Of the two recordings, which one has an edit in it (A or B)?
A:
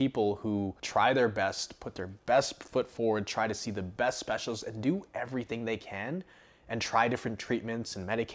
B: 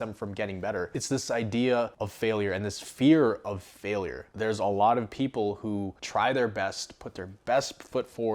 B